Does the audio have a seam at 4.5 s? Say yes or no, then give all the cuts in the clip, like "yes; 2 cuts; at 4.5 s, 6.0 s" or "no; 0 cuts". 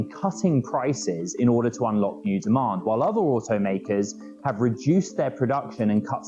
no; 0 cuts